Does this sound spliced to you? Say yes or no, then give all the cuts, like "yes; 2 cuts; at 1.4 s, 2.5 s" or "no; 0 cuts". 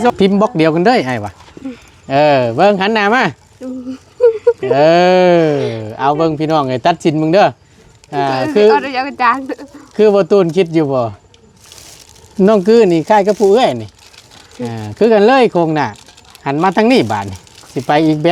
no; 0 cuts